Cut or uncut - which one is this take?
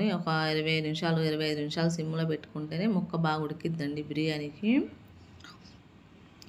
uncut